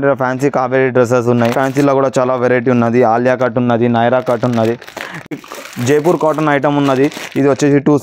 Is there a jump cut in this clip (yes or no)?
yes